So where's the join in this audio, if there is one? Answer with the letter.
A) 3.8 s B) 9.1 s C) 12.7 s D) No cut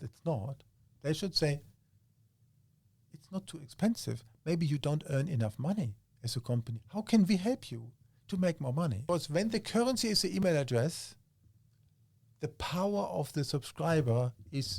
B